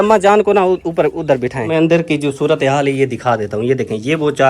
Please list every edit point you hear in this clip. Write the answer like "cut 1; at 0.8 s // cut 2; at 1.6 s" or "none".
cut 1; at 1.7 s